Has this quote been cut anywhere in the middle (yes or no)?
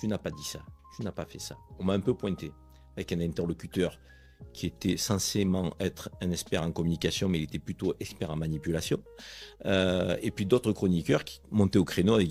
no